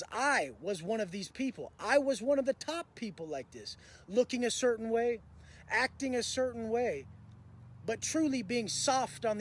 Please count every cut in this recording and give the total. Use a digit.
0